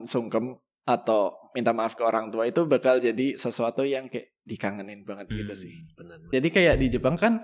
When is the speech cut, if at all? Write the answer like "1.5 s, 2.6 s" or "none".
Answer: 6.3 s